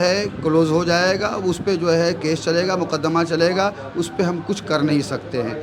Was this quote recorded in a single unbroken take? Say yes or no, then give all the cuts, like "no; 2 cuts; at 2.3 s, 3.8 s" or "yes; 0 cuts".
yes; 0 cuts